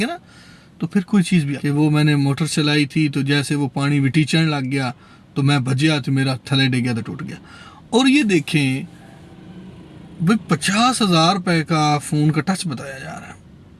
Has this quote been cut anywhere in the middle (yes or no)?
yes